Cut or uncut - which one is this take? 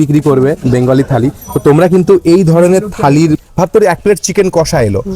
cut